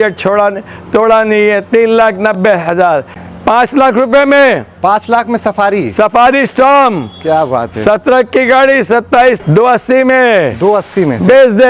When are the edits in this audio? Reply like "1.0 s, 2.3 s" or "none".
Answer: 3.2 s, 9.4 s